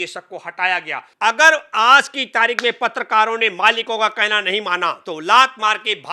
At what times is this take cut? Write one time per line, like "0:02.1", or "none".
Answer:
0:01.0
0:05.0